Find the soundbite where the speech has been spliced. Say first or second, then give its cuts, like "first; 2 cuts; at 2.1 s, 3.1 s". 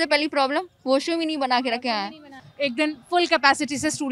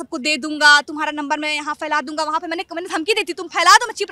first; 1 cut; at 2.4 s